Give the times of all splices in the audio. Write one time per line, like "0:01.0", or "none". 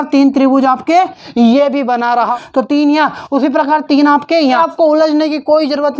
0:02.3
0:04.6